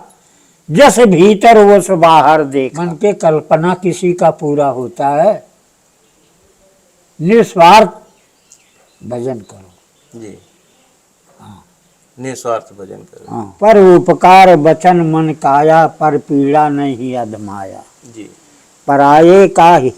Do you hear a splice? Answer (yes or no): yes